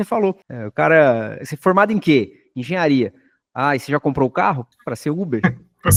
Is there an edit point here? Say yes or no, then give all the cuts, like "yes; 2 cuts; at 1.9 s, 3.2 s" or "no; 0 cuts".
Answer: no; 0 cuts